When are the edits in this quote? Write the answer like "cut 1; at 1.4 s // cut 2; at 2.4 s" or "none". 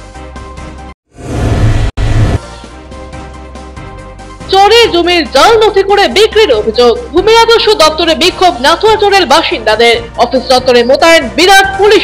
cut 1; at 0.9 s